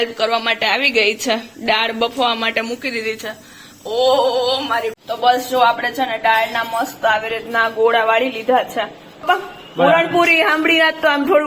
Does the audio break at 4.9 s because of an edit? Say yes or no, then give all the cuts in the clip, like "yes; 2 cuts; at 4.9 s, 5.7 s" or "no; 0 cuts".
yes; 2 cuts; at 4.9 s, 9.2 s